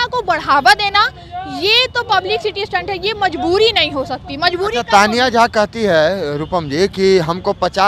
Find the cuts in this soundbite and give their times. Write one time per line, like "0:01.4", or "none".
none